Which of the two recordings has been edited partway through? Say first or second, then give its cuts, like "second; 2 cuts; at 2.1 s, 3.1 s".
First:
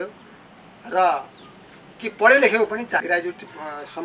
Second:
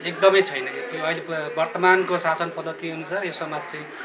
first; 1 cut; at 3.0 s